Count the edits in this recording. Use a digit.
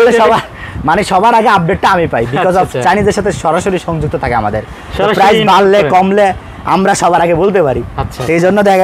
0